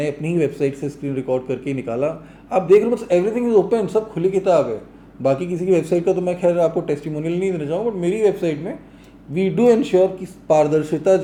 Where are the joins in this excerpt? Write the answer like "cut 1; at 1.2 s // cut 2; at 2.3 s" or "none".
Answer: none